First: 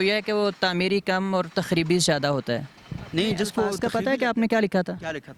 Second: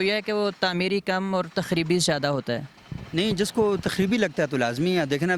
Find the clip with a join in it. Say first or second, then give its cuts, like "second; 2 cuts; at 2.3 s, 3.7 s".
first; 1 cut; at 3.8 s